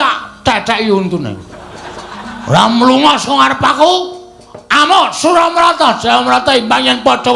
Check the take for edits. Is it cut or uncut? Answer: uncut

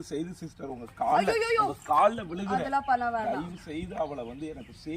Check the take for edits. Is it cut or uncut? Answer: uncut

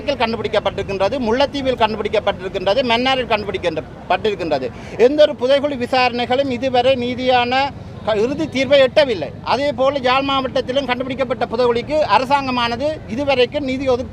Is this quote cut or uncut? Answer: uncut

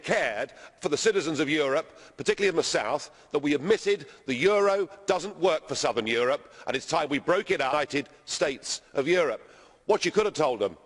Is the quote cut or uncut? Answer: uncut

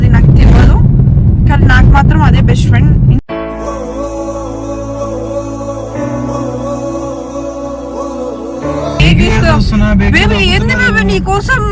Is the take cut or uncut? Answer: cut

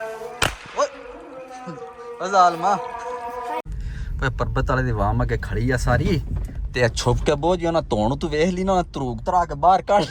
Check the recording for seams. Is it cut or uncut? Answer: cut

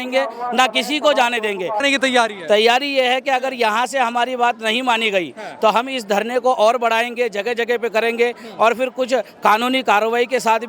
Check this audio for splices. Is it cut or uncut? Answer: cut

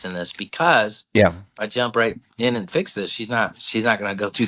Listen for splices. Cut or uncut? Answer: uncut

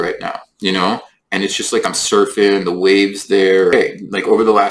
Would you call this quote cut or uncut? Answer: cut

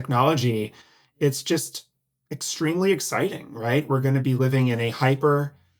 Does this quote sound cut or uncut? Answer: uncut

